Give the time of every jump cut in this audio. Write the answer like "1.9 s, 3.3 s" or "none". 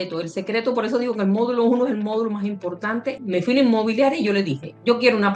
3.2 s